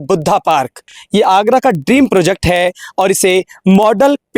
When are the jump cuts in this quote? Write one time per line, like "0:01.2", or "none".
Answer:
0:00.9